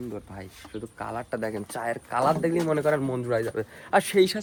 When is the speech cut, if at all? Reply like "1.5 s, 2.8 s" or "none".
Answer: none